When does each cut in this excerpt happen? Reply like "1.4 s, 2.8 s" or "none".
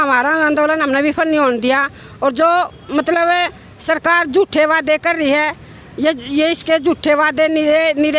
none